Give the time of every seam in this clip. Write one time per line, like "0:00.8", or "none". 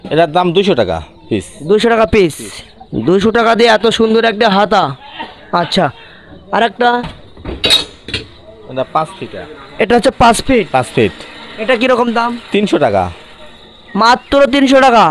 none